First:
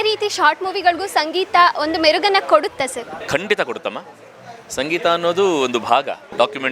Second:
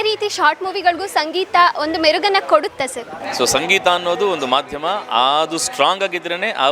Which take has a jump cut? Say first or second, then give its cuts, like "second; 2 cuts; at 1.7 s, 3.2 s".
second; 1 cut; at 3.2 s